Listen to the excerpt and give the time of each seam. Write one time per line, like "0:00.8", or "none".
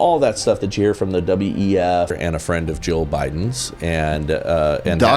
0:02.2